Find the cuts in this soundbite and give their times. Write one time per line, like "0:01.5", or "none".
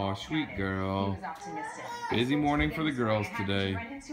0:02.4